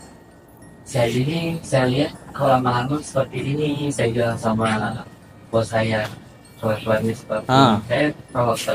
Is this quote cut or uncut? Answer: uncut